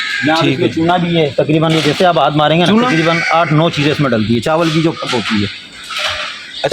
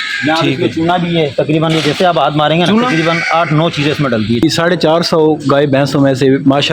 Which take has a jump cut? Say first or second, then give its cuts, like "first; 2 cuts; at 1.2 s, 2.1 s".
second; 1 cut; at 4.4 s